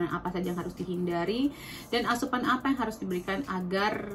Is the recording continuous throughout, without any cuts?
yes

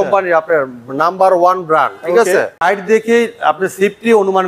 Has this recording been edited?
yes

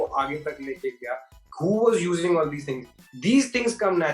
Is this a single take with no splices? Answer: yes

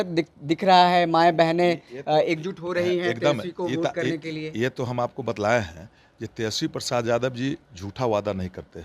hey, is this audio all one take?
yes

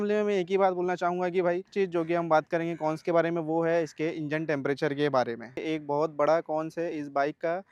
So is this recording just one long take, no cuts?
no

